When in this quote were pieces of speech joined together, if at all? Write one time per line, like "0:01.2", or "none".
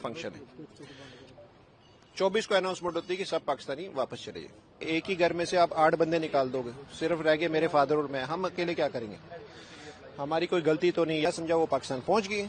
0:04.8
0:11.2